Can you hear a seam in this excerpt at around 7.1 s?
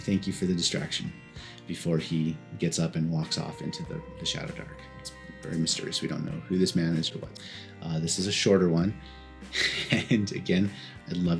no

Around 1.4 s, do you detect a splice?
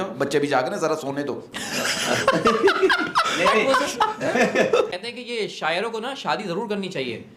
no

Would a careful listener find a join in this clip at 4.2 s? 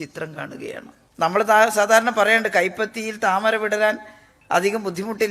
no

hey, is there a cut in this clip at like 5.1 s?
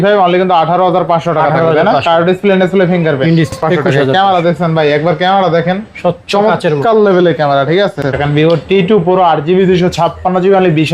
no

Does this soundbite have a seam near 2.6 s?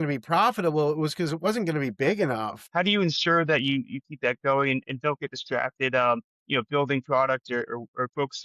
yes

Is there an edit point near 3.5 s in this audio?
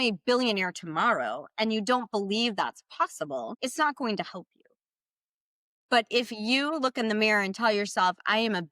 yes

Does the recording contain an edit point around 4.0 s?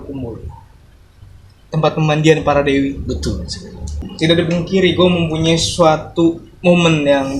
yes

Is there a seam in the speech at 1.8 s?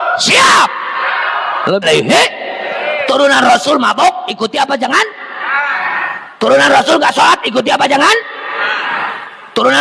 yes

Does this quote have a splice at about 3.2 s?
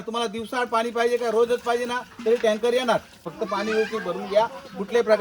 yes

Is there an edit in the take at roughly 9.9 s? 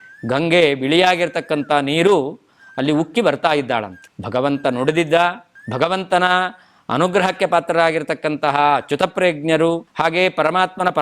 yes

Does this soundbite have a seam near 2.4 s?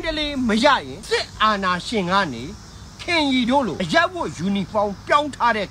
no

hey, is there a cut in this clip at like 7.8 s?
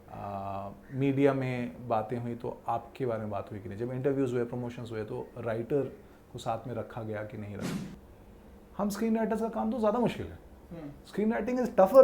yes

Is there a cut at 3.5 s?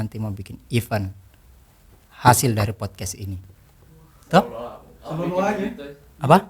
no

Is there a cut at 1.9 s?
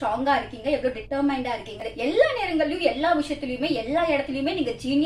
yes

